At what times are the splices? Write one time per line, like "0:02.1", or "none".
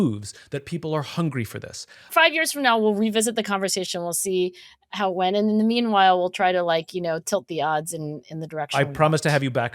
0:02.1
0:08.7